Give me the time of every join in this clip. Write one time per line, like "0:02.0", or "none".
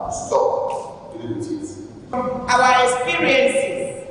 0:02.1

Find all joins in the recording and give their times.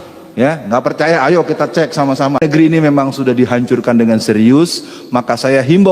0:02.4

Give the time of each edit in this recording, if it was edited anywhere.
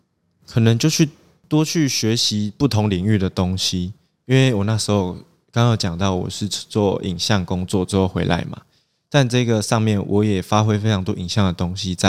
none

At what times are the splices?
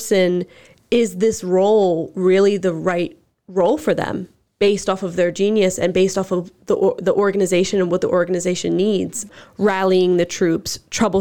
0:09.3

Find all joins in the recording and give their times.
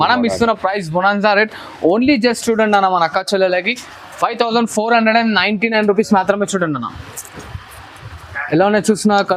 none

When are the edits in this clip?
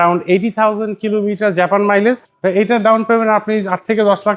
0:02.3

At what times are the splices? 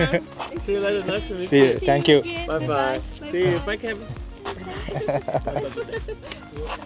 none

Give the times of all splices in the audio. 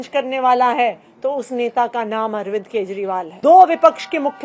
0:03.3

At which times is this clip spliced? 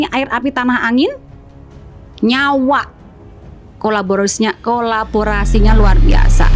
none

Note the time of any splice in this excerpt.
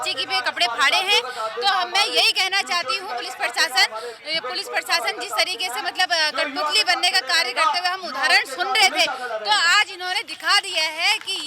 none

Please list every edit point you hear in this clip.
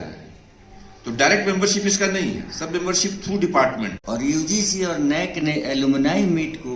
0:04.0

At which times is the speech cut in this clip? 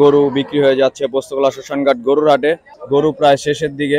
0:02.7

